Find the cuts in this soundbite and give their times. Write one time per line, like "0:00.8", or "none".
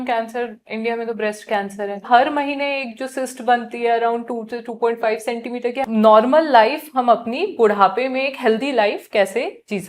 0:02.1
0:05.8